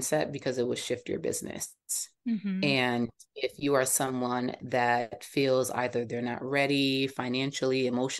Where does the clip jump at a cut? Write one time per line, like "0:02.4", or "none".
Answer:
none